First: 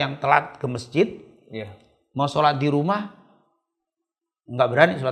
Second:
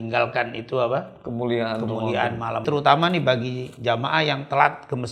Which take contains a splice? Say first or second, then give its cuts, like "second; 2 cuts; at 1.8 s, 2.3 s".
second; 1 cut; at 2.6 s